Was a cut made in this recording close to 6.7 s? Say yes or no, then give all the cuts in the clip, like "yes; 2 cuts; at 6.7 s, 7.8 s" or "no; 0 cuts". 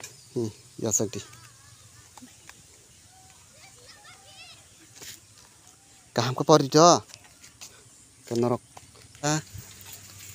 no; 1 cut; at 9.3 s